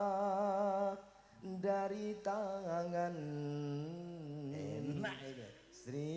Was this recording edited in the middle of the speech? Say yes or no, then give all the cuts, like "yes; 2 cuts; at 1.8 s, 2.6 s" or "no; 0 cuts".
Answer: no; 0 cuts